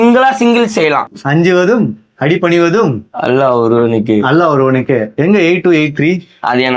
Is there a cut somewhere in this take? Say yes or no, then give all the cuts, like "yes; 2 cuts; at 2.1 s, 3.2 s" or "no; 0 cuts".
yes; 1 cut; at 1.2 s